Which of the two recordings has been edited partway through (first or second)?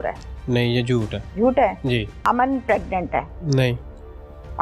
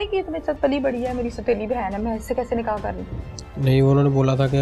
first